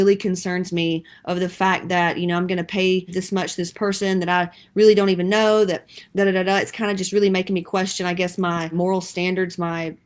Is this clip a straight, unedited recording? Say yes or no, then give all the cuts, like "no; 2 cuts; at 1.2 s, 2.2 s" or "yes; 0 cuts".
no; 1 cut; at 3.2 s